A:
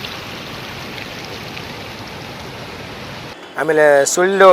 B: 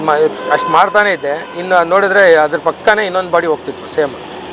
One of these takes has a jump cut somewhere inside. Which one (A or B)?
A